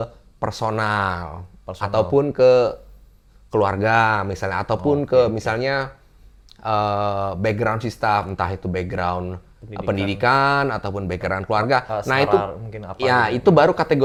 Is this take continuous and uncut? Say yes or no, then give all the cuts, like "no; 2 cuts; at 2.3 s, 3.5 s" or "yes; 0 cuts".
yes; 0 cuts